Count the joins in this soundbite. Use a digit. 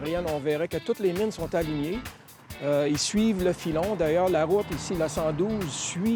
0